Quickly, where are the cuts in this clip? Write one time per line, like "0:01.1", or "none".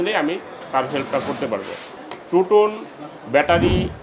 0:01.9